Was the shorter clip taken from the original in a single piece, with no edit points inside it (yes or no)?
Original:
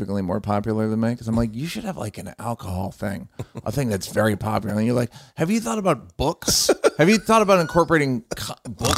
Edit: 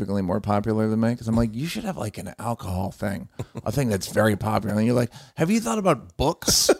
yes